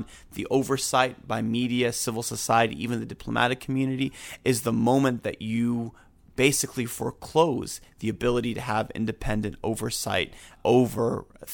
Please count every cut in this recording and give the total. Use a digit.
1